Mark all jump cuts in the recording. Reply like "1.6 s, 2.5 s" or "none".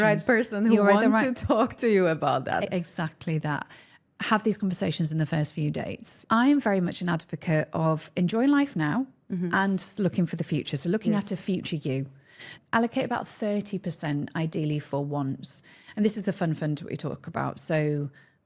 6.2 s, 12.6 s